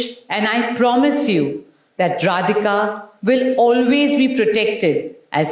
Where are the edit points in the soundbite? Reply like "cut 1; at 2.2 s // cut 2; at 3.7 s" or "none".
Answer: none